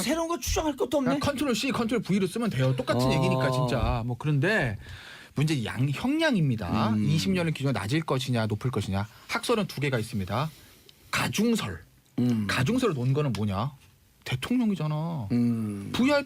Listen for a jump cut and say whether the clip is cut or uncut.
cut